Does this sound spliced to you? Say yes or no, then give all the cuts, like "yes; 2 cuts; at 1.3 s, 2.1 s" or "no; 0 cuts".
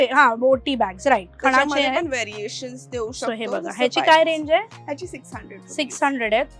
no; 0 cuts